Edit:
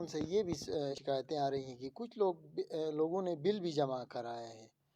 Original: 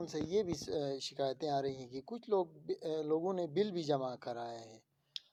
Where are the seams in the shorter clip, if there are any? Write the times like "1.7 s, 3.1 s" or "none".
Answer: 1.0 s

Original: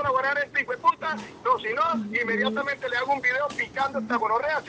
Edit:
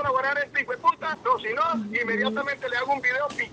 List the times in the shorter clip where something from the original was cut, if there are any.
1.1 s

